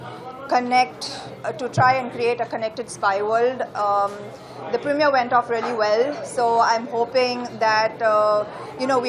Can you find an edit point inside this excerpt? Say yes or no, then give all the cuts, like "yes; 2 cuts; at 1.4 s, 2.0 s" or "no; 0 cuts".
no; 0 cuts